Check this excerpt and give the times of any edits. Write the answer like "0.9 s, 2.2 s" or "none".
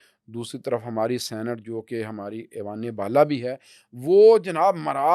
none